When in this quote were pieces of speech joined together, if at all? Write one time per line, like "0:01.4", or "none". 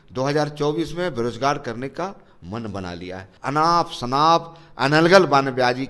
0:03.2